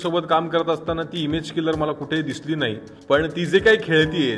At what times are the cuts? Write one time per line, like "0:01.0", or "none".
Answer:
0:02.9